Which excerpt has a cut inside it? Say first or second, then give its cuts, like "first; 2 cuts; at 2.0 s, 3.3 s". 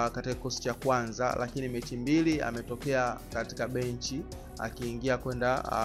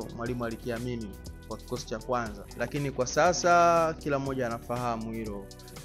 second; 1 cut; at 2.4 s